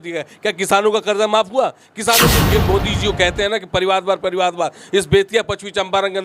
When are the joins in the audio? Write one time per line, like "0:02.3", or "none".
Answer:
0:02.4

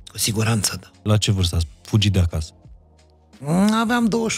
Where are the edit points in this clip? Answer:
0:01.0

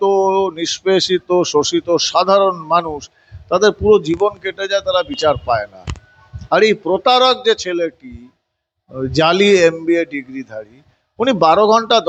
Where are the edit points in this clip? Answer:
none

